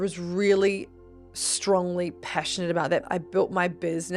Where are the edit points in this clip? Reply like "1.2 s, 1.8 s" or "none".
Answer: 3.1 s